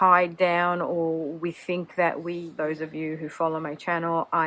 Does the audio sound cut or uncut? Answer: cut